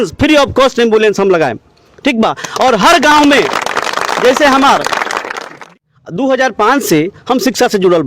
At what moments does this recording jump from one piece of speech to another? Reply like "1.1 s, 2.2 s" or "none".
5.6 s